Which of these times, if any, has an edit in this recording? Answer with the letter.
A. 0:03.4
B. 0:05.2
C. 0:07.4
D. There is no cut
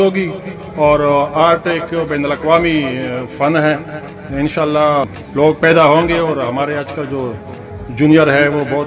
B